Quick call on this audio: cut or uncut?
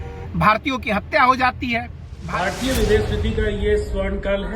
cut